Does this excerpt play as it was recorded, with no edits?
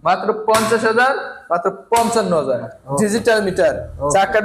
no; 1 cut; at 2.8 s

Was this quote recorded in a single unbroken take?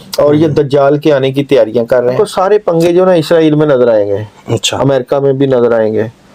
no; 1 cut; at 2.1 s

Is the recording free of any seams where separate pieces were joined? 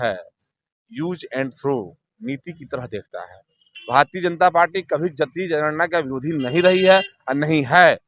no; 1 cut; at 3.7 s

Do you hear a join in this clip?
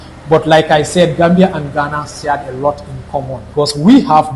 yes; 1 cut; at 3.4 s

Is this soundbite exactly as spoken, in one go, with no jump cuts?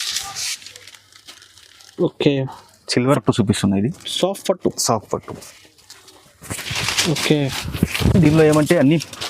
no; 1 cut; at 3.2 s

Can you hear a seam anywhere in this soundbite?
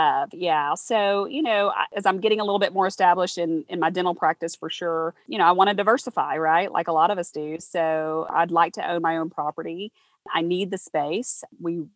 yes; 3 cuts; at 1.9 s, 5.3 s, 8.3 s

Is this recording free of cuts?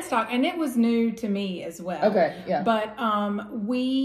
yes; 0 cuts

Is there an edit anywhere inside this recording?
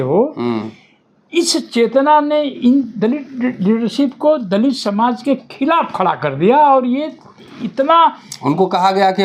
no; 0 cuts

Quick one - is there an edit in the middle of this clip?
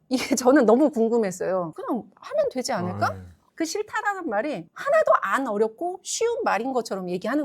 yes; 1 cut; at 3.4 s

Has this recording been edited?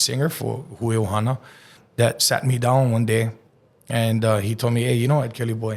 yes; 1 cut; at 1.8 s

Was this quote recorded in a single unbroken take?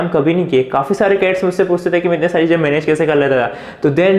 yes; 0 cuts

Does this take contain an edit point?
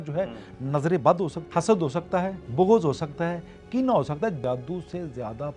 yes; 3 cuts; at 1.4 s, 2.4 s, 4.4 s

